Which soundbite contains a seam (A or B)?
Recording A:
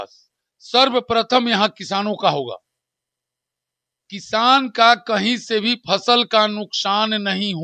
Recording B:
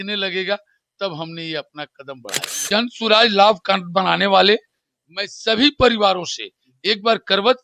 B